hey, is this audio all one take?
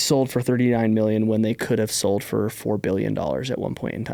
yes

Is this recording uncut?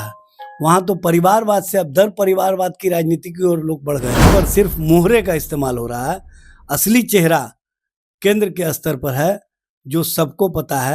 no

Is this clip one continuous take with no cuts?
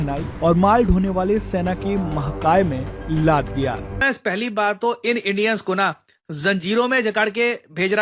no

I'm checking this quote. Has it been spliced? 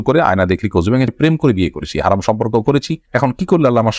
yes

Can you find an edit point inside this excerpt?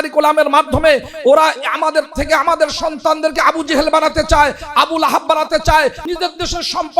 yes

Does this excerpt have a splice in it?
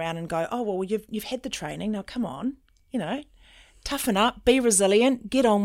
no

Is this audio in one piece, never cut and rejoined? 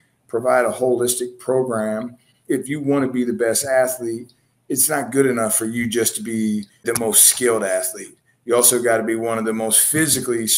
no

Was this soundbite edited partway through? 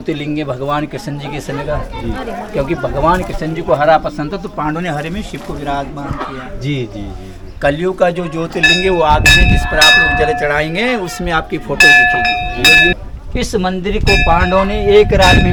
no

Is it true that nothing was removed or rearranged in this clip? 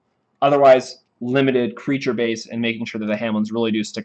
no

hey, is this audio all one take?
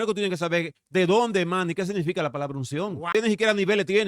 no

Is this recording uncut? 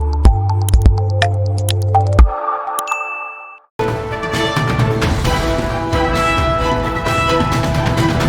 no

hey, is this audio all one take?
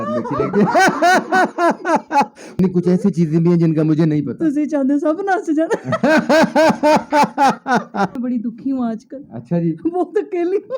no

